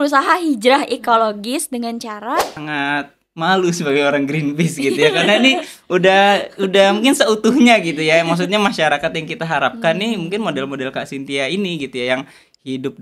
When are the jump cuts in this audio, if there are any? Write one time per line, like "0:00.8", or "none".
0:02.5